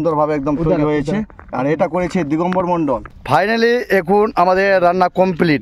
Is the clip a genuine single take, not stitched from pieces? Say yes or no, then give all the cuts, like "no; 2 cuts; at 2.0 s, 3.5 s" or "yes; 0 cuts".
yes; 0 cuts